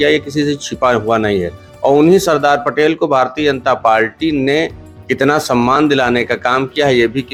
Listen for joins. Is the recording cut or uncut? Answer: uncut